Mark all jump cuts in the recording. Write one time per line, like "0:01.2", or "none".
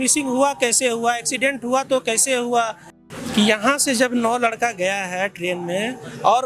0:02.9